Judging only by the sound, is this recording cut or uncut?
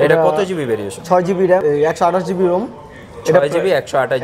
cut